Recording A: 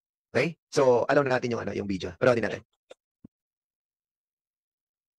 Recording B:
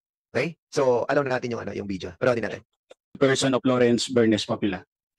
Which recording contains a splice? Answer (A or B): B